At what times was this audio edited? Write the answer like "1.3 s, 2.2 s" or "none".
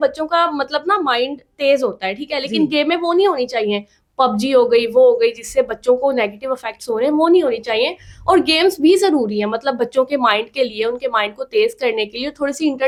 none